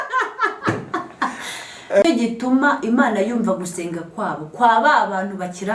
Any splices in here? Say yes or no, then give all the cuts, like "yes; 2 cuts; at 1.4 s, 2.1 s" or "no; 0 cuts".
yes; 1 cut; at 2.0 s